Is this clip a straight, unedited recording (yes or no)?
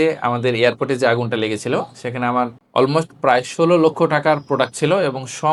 yes